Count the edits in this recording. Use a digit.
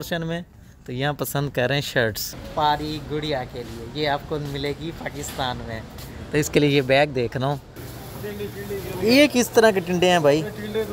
2